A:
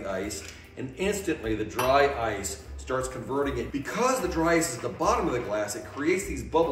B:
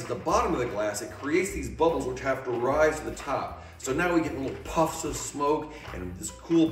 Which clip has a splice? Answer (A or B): A